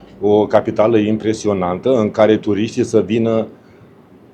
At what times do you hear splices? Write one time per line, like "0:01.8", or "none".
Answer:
none

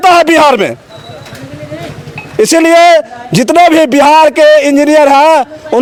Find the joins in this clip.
none

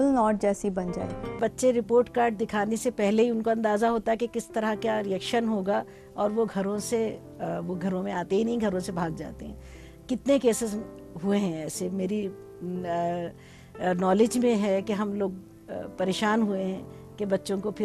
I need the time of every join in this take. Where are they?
0:01.4

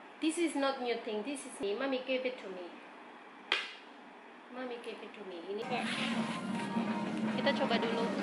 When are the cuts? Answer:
0:01.7
0:05.6

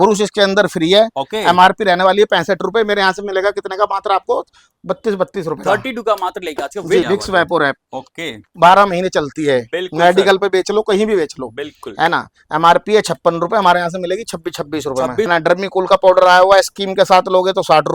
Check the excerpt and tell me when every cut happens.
0:07.0
0:15.3

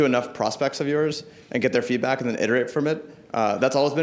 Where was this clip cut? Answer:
none

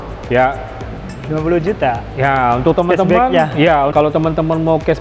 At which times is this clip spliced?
0:03.9

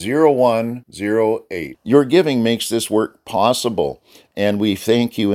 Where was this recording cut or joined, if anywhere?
none

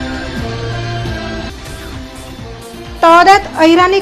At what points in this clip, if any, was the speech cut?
none

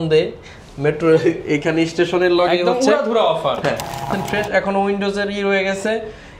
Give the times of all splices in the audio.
0:04.1

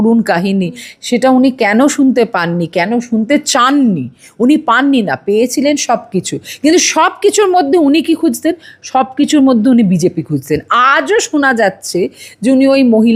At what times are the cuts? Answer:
none

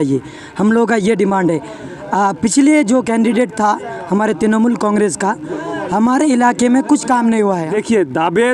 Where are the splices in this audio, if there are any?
0:07.6

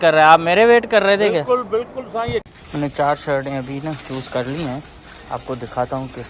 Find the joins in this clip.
0:02.5

